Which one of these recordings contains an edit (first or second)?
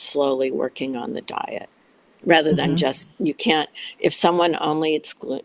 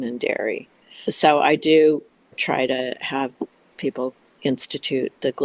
second